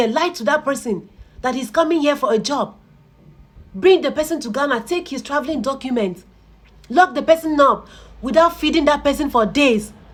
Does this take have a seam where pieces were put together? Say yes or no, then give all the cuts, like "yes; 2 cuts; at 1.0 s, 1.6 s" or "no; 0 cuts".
no; 0 cuts